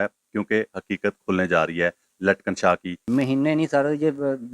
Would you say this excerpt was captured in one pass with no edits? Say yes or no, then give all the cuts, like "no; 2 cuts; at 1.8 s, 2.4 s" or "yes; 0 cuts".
no; 1 cut; at 2.9 s